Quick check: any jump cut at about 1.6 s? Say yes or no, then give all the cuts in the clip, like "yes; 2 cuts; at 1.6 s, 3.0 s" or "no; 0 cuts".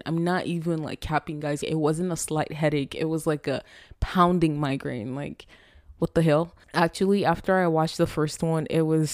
yes; 2 cuts; at 1.6 s, 6.6 s